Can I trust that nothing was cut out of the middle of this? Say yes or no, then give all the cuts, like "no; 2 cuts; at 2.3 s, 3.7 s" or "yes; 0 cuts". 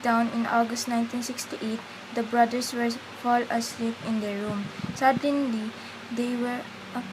no; 1 cut; at 4.8 s